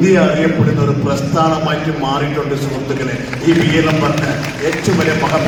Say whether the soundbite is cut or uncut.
uncut